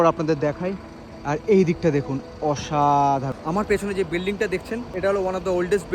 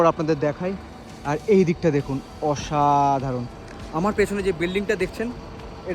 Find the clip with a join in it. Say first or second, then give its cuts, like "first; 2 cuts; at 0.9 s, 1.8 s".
first; 2 cuts; at 3.3 s, 4.9 s